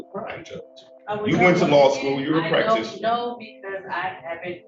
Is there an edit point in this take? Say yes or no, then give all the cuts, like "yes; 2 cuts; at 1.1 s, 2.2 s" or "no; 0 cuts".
no; 0 cuts